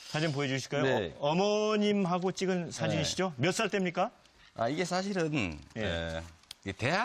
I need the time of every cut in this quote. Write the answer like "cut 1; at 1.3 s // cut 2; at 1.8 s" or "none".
none